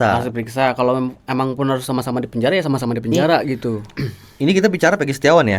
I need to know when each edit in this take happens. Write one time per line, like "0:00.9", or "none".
0:03.9